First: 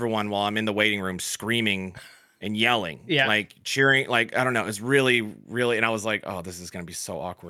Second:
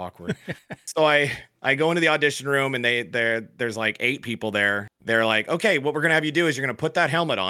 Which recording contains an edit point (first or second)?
second